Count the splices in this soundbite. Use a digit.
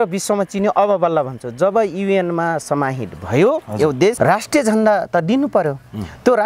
1